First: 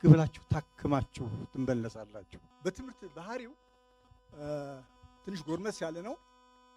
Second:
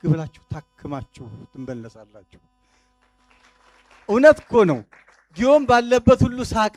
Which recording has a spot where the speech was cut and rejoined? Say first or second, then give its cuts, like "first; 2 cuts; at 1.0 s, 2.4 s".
first; 1 cut; at 2.4 s